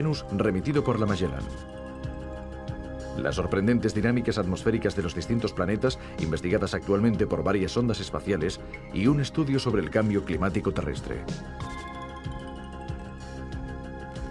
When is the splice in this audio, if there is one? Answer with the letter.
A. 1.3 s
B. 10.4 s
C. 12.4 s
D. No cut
B